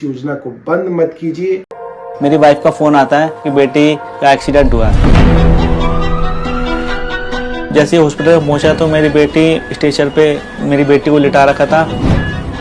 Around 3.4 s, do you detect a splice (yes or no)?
no